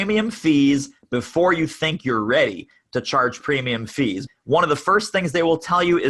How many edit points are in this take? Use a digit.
1